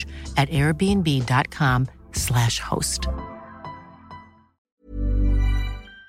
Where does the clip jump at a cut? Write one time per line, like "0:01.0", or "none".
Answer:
0:04.6